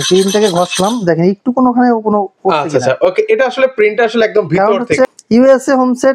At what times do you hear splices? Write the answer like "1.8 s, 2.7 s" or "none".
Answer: 5.1 s